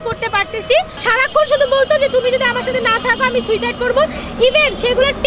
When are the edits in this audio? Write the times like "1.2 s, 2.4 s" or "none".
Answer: 1.0 s